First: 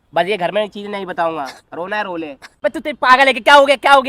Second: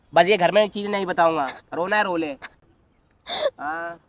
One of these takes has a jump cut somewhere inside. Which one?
first; 1 cut; at 2.4 s

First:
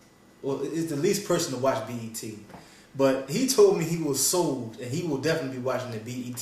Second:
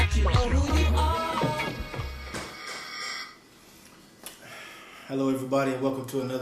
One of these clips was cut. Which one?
first; 1 cut; at 3.2 s

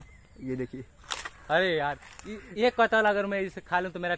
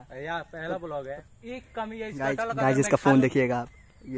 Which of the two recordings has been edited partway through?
second; 1 cut; at 1.2 s

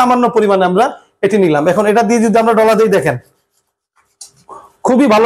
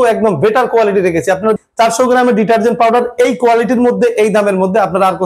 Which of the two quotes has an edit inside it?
second; 1 cut; at 1.6 s

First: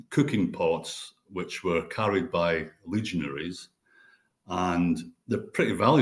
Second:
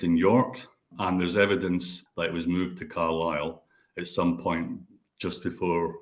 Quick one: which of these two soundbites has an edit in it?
second; 2 cuts; at 0.9 s, 2.0 s

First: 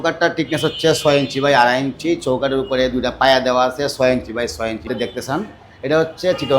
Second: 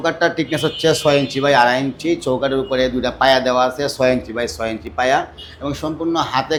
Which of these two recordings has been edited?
first; 1 cut; at 4.9 s

